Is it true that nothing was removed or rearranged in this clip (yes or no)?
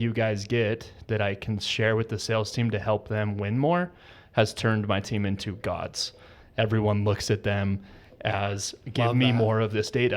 yes